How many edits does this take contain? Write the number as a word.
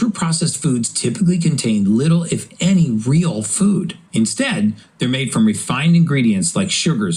zero